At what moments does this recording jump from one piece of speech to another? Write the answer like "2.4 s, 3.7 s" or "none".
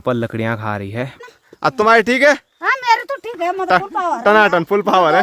1.2 s